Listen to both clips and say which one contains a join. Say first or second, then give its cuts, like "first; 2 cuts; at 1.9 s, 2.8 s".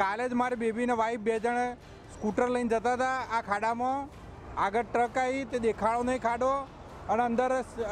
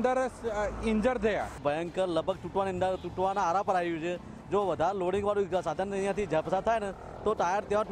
second; 1 cut; at 1.5 s